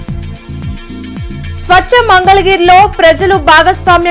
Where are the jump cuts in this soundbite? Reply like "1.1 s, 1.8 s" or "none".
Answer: 1.3 s